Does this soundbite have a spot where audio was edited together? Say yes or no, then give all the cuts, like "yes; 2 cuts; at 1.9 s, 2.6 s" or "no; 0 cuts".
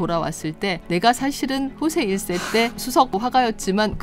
yes; 1 cut; at 3.1 s